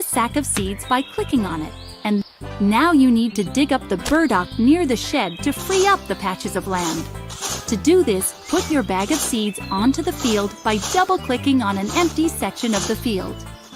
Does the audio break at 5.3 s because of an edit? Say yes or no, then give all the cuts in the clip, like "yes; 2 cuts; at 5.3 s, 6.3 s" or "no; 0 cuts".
no; 1 cut; at 2.2 s